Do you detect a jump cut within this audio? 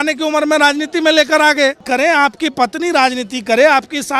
yes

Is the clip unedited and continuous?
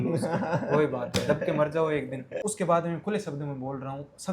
no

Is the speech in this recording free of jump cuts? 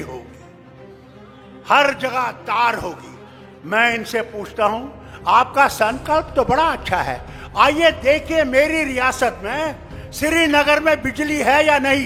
yes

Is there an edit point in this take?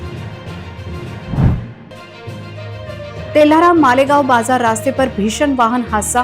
yes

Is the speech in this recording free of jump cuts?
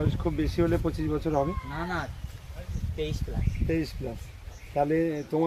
yes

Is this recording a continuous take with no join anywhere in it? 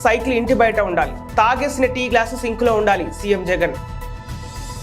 no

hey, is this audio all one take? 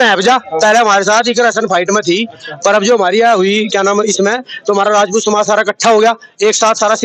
yes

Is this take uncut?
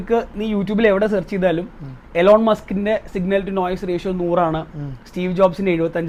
yes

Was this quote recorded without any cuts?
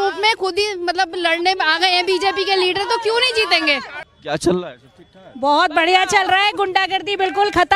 no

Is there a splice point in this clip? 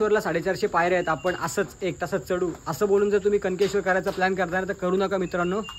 no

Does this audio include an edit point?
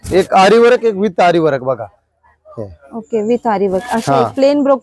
no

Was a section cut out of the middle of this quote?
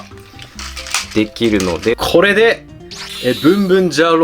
yes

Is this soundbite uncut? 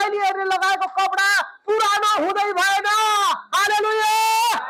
yes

